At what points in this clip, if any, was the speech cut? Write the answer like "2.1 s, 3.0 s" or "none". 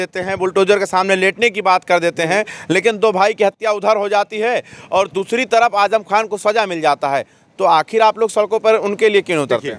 none